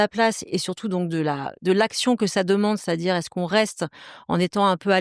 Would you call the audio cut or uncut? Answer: uncut